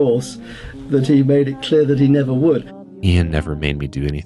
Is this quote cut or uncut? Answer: cut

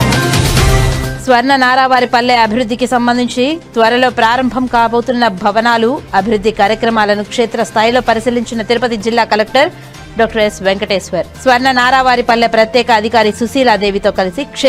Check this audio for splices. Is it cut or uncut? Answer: uncut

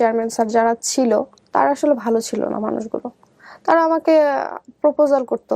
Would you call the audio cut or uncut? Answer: cut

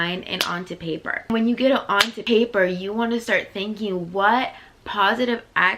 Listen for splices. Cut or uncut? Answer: cut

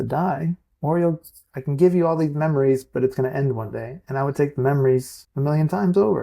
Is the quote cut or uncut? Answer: cut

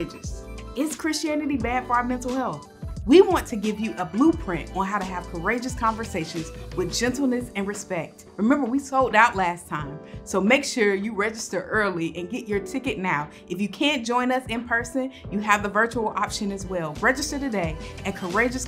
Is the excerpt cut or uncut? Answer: cut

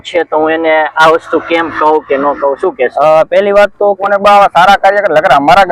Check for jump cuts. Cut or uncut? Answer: cut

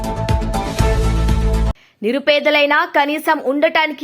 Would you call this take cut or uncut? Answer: uncut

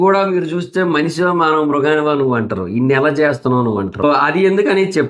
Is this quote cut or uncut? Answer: cut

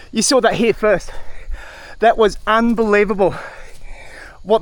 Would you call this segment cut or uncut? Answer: uncut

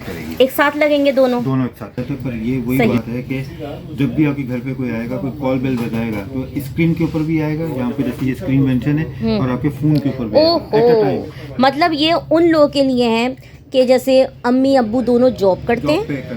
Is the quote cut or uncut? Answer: cut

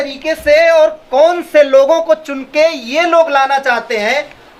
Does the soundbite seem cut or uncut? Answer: uncut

